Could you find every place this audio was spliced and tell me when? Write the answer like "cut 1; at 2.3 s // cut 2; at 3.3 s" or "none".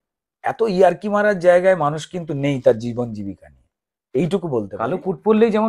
cut 1; at 4.8 s